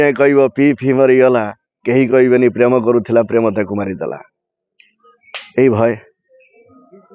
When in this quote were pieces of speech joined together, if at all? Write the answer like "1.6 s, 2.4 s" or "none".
none